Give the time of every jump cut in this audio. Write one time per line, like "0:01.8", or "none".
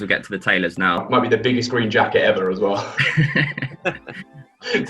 0:01.0